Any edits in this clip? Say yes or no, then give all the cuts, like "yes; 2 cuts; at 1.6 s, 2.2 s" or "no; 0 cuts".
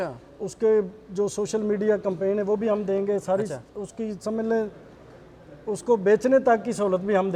no; 0 cuts